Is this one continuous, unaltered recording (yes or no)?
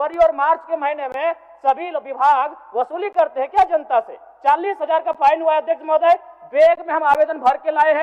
yes